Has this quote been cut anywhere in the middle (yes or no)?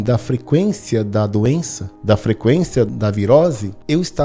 yes